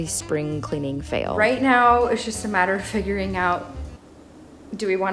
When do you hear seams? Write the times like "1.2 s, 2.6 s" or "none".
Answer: 1.4 s